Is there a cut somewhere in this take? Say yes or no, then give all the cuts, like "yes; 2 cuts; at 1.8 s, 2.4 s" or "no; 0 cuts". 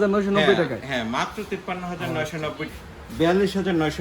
yes; 1 cut; at 2.7 s